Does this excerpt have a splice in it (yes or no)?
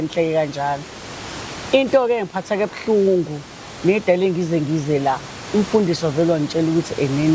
no